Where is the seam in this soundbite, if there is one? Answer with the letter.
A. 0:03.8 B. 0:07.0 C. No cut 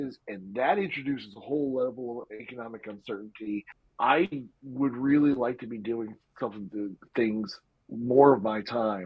A